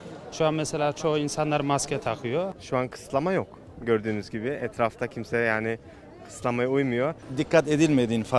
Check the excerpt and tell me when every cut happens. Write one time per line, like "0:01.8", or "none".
0:02.6
0:07.2